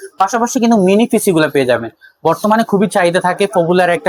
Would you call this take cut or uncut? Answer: uncut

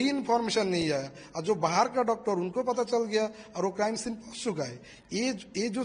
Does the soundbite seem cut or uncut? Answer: uncut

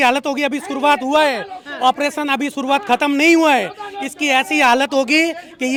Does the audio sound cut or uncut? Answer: uncut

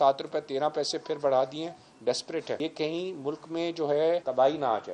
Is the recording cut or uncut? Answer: cut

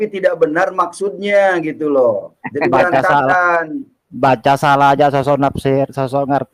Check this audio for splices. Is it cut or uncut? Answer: uncut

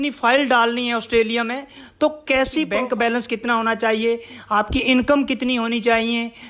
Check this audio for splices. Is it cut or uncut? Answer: cut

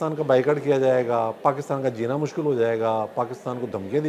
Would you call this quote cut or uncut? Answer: uncut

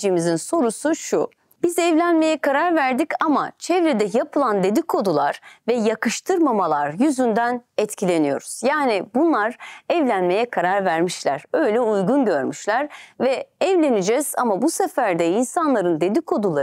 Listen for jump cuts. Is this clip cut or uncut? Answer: cut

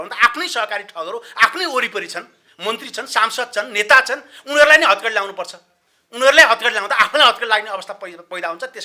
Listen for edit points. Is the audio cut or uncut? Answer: uncut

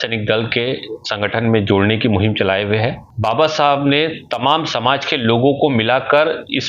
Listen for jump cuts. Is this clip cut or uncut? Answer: cut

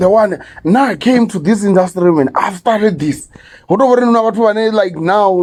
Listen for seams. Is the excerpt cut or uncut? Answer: uncut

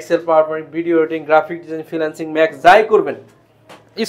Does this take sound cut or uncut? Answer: uncut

